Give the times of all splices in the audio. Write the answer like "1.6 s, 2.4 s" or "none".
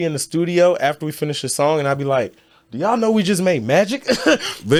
none